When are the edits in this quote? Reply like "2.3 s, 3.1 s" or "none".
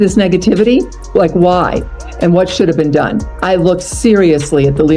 1.0 s, 3.3 s